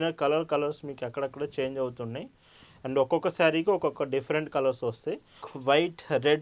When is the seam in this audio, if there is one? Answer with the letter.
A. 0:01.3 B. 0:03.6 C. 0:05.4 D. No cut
C